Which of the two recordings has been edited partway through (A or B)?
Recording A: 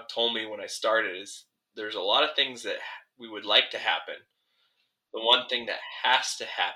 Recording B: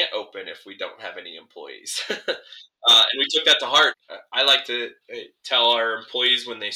B